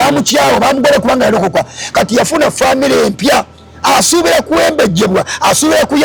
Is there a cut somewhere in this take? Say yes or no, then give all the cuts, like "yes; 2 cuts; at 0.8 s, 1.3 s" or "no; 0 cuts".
no; 0 cuts